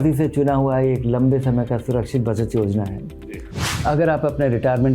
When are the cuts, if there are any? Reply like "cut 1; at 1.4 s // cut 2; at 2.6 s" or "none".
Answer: cut 1; at 3.5 s

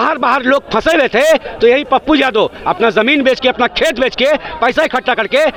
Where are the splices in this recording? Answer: none

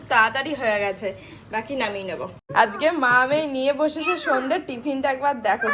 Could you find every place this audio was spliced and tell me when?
cut 1; at 2.4 s

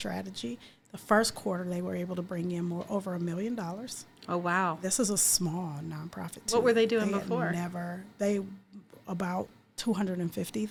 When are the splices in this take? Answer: none

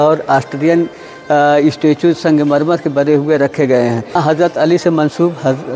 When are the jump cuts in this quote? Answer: cut 1; at 4.2 s

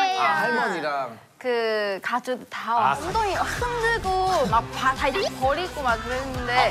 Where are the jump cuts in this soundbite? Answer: cut 1; at 3.1 s

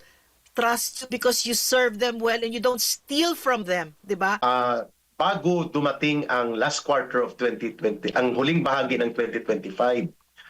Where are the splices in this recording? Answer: cut 1; at 4.4 s

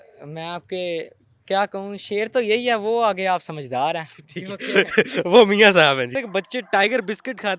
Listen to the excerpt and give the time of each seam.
cut 1; at 6.1 s

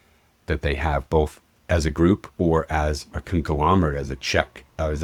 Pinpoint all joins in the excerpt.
none

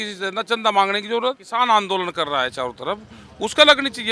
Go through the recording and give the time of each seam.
cut 1; at 1.4 s

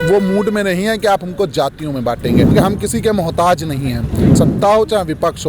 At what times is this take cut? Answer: cut 1; at 2.5 s // cut 2; at 4.4 s

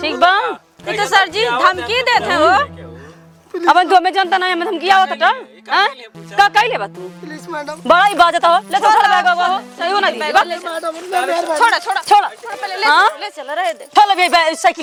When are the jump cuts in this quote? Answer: none

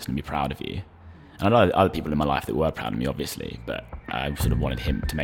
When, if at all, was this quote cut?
none

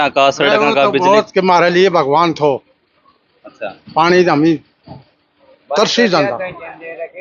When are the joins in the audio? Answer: none

